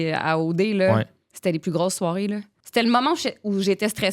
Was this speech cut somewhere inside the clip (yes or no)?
yes